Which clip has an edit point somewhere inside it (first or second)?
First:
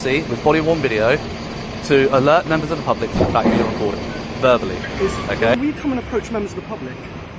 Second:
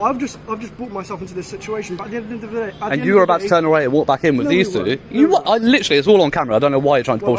first